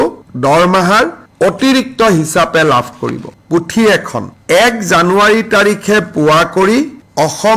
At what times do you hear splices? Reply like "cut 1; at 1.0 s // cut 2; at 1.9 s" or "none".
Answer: cut 1; at 3.3 s